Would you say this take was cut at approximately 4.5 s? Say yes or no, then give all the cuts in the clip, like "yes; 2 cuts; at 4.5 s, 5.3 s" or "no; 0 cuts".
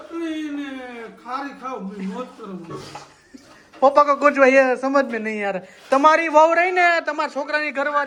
no; 0 cuts